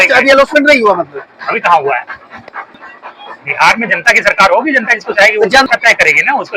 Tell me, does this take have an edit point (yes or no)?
yes